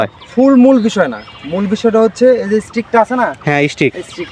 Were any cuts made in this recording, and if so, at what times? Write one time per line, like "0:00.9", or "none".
none